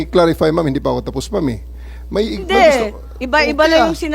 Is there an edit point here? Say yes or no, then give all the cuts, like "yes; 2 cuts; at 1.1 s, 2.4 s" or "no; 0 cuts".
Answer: no; 0 cuts